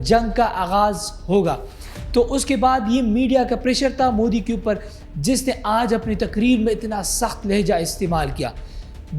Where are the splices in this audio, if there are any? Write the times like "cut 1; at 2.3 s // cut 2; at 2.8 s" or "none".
none